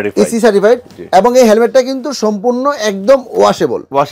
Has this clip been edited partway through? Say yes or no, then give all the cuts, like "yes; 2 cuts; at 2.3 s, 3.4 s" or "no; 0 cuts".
no; 0 cuts